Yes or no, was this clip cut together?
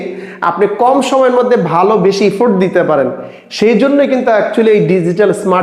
no